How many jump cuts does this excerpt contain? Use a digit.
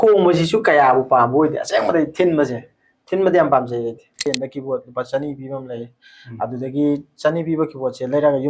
1